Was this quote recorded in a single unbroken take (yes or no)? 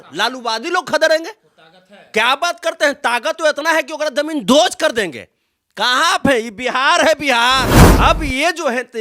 no